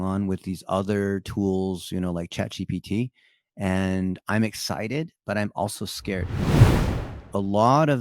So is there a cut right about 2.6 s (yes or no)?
no